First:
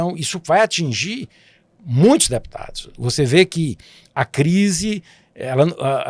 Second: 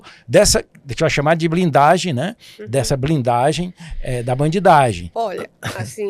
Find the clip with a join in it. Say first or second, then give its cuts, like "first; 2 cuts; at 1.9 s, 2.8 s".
second; 1 cut; at 5.0 s